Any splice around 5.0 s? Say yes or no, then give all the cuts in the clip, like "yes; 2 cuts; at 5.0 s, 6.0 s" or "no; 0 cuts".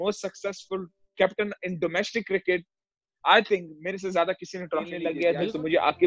yes; 1 cut; at 5.0 s